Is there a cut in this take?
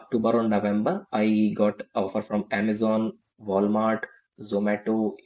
no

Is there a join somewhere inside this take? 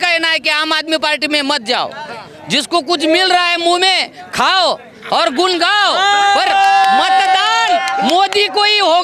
no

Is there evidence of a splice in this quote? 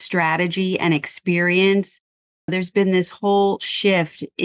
no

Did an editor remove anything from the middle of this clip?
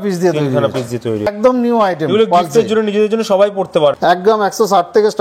yes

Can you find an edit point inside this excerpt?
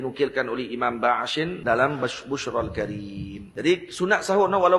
yes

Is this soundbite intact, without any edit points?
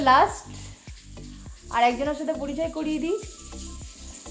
yes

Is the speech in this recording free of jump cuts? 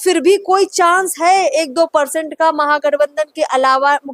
yes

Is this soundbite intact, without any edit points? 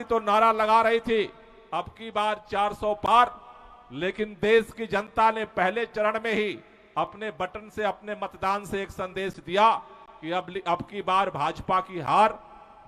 yes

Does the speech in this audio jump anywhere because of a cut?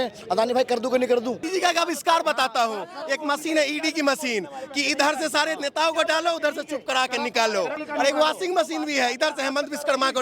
yes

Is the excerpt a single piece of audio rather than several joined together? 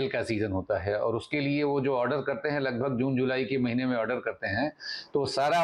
yes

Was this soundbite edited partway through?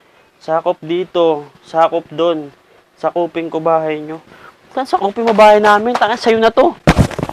no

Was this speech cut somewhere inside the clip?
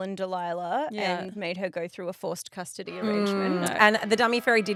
no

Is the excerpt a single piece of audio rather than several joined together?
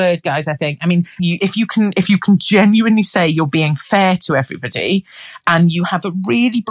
no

